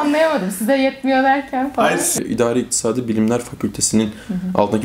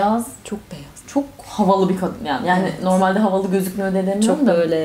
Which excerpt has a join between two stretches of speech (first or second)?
first